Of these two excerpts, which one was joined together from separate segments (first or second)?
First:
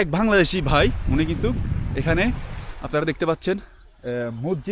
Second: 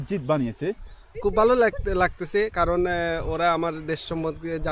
second